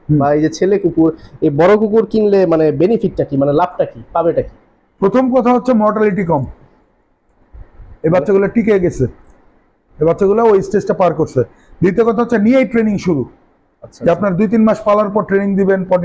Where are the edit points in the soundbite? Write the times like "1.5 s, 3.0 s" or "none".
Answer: none